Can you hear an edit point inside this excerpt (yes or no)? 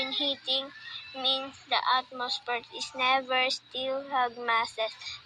yes